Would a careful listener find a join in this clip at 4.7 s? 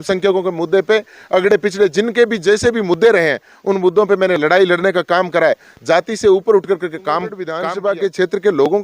no; 1 cut; at 7.6 s

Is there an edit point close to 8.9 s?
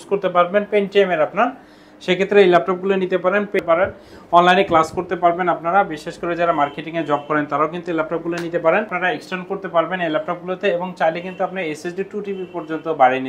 yes; 2 cuts; at 3.6 s, 8.9 s

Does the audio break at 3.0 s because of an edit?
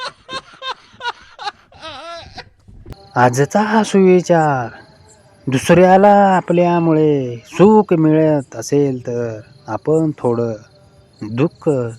yes; 1 cut; at 3.0 s

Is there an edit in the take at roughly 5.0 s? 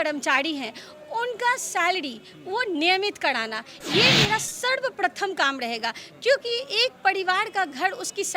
no; 0 cuts

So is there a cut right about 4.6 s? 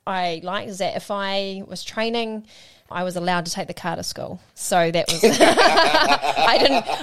no; 1 cut; at 2.8 s

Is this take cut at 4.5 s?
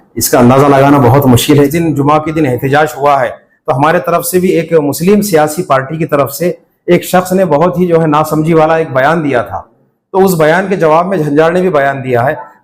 yes; 2 cuts; at 1.7 s, 4.5 s

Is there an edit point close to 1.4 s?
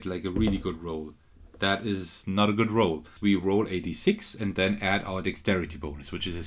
no; 1 cut; at 3.1 s

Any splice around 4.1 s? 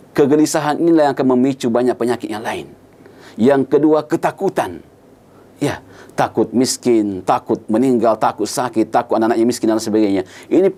no; 0 cuts

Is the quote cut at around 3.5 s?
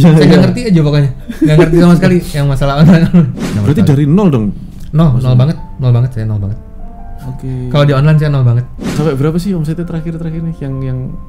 yes; 2 cuts; at 3.5 s, 8.8 s

